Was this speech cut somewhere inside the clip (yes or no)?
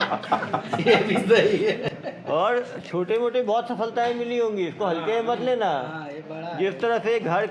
no